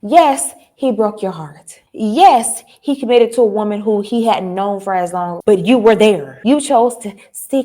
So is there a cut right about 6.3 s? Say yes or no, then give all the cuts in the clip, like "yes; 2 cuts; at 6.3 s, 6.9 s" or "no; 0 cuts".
yes; 1 cut; at 6.3 s